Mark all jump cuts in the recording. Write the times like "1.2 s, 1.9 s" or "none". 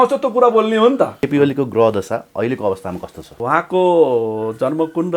1.2 s, 3.4 s